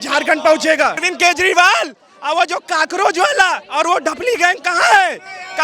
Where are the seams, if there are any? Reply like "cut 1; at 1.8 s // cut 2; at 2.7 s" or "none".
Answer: cut 1; at 1.1 s